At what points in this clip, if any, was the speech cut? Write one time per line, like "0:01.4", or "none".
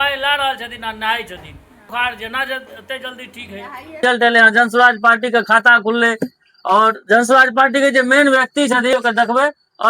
0:01.9
0:04.0
0:08.9